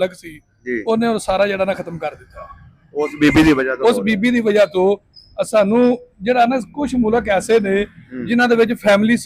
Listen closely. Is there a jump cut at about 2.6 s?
no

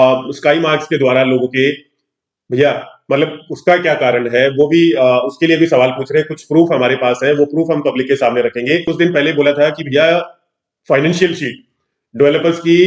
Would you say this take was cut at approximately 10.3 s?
no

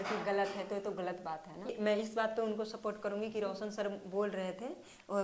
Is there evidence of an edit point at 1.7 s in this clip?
yes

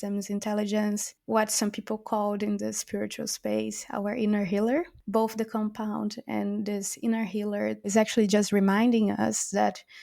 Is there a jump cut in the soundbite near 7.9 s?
yes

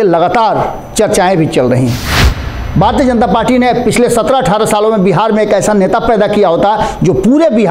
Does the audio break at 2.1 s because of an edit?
yes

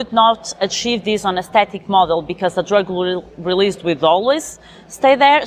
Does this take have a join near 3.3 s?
no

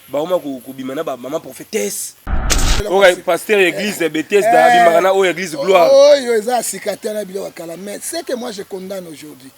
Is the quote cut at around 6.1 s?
no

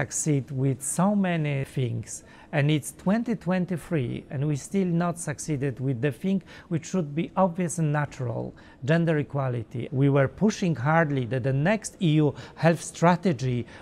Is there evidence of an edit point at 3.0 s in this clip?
no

